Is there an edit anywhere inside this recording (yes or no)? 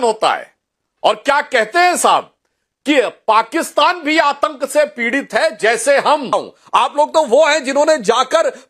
yes